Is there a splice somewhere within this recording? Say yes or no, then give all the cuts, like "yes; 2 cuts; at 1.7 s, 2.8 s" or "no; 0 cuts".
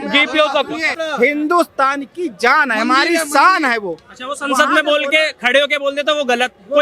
yes; 1 cut; at 0.9 s